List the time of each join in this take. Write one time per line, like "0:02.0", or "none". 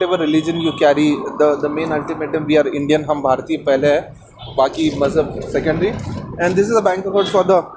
none